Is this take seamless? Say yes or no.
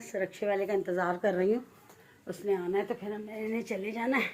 yes